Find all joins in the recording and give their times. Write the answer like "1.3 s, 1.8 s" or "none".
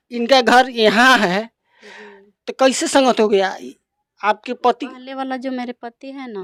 none